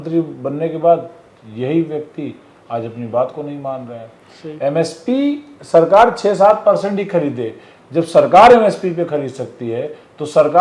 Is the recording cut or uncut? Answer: uncut